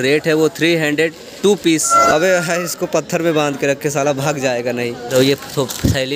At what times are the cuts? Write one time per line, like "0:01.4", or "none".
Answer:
0:01.9
0:05.1